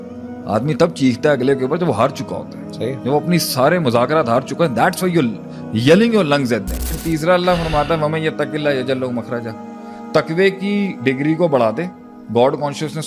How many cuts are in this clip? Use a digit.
1